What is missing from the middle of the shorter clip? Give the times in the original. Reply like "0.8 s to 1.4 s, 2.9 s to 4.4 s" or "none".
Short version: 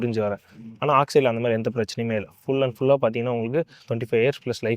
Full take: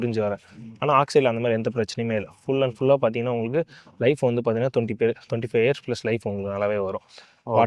3.8 s to 5.3 s